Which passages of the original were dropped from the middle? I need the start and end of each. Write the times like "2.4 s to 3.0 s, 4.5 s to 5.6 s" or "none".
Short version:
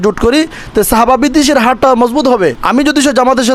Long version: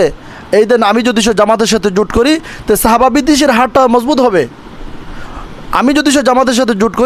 4.5 s to 5.7 s

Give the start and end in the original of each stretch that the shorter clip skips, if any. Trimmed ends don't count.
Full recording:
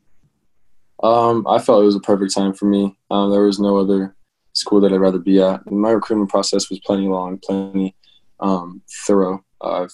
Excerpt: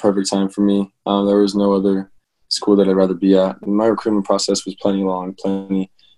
none

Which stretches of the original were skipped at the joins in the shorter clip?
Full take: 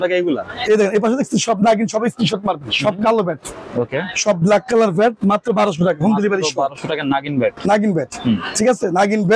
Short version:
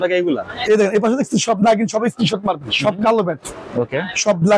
none

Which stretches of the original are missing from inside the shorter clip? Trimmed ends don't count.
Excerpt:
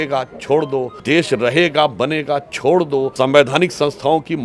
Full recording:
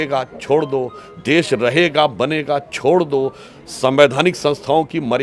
0.9 s to 1.1 s, 3.3 s to 3.8 s

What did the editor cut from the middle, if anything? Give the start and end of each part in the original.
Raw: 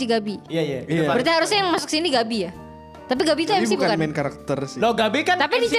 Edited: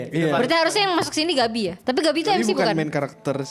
2.5 s to 3.0 s

